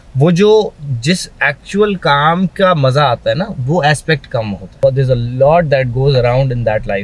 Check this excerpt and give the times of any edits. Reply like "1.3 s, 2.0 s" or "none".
4.7 s